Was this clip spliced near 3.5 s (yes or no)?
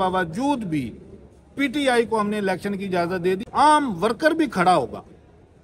yes